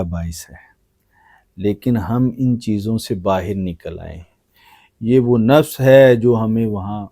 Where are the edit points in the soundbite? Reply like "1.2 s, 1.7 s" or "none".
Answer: none